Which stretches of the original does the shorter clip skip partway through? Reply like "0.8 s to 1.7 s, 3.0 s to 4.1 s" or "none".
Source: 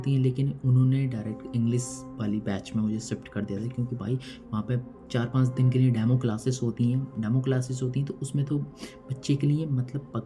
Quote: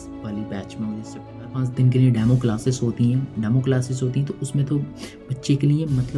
3.5 s to 5.3 s

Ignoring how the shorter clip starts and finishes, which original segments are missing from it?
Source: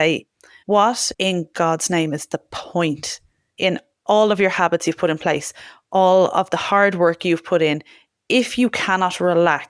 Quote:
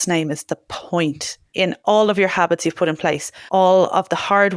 3.5 s to 3.9 s, 5.5 s to 5.7 s

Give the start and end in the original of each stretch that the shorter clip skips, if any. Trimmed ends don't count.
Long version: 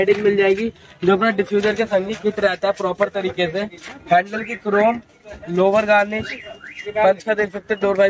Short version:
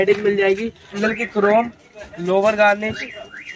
1.0 s to 4.3 s

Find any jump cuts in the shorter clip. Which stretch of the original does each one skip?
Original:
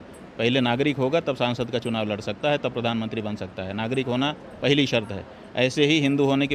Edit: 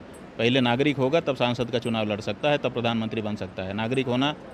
none

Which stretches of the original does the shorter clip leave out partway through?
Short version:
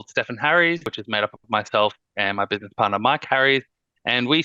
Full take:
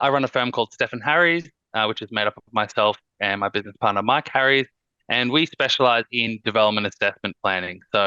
1.6 s to 2.0 s

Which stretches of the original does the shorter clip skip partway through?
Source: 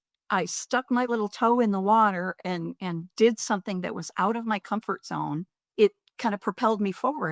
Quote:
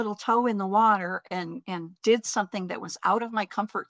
none

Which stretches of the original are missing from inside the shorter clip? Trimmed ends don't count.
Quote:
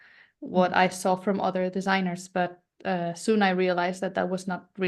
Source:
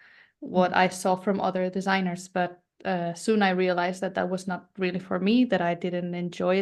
none

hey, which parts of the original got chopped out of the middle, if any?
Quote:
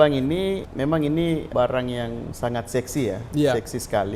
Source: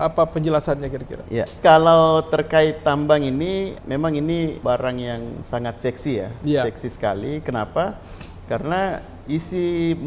none

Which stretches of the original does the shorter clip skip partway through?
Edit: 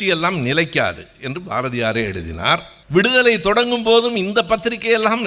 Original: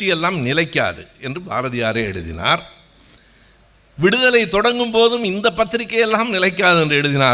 2.8 s to 3.8 s

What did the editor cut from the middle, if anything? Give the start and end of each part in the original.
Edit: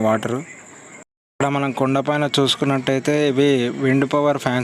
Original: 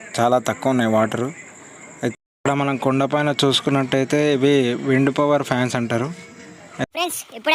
2.0 s to 2.1 s

